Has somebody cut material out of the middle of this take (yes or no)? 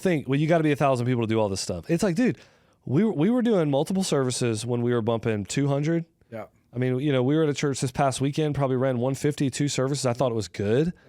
no